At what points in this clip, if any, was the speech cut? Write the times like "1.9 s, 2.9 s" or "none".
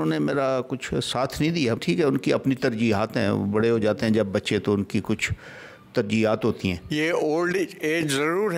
1.8 s, 6.8 s